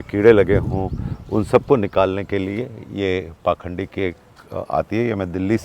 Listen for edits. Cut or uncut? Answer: uncut